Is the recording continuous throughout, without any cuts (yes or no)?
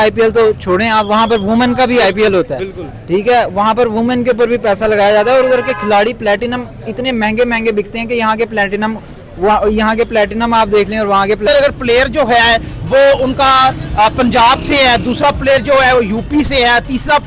no